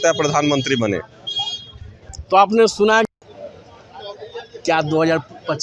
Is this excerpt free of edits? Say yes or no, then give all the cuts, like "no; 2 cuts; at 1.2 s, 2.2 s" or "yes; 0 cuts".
no; 1 cut; at 3.2 s